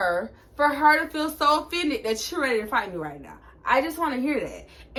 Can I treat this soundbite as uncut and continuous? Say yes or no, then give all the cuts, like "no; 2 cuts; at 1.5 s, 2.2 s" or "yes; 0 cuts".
yes; 0 cuts